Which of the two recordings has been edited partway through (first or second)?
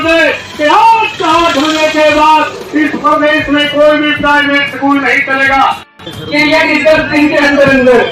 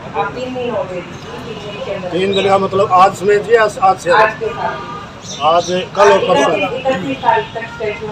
first